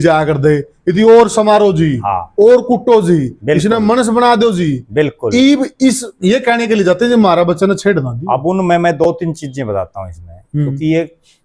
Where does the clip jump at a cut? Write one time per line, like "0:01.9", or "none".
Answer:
none